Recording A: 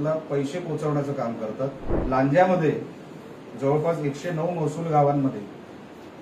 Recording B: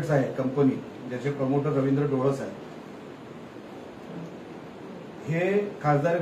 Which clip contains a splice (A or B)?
A